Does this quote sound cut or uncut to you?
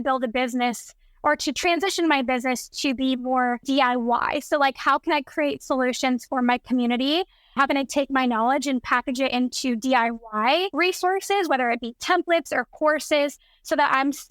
cut